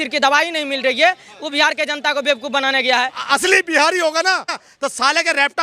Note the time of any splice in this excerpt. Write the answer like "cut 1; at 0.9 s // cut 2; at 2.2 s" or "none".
cut 1; at 3.2 s // cut 2; at 4.6 s